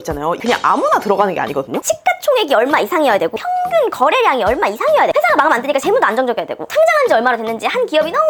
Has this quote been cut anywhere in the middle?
no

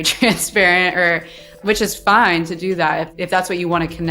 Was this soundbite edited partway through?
yes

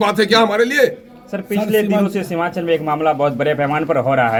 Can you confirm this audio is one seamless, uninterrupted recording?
yes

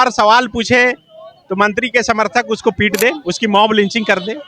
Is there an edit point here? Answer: yes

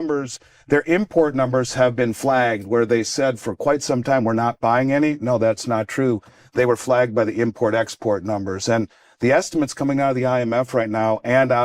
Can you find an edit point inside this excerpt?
no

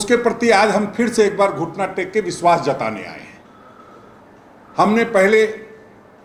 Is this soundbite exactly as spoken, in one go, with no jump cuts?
yes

